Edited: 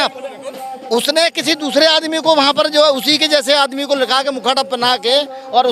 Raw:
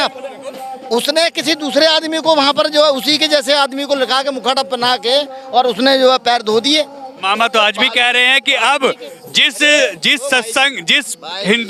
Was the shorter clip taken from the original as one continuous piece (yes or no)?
yes